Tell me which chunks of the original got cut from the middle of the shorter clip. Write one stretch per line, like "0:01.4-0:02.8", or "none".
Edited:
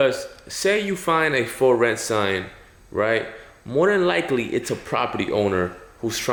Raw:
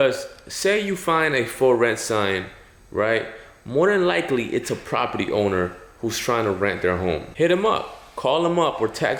none